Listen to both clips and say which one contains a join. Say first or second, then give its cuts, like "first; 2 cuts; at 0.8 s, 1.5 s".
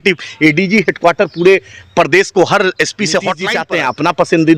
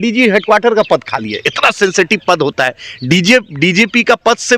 first; 1 cut; at 3.5 s